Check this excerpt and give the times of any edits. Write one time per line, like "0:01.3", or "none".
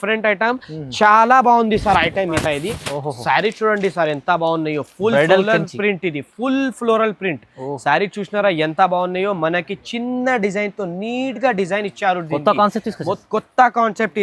0:02.3